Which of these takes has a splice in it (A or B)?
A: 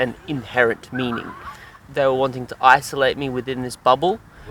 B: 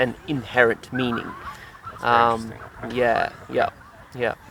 A